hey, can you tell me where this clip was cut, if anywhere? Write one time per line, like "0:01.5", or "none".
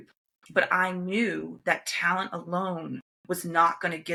none